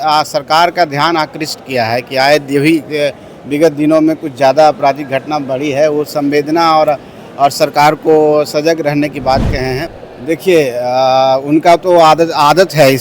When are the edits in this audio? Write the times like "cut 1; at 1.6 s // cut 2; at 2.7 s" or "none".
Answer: cut 1; at 9.9 s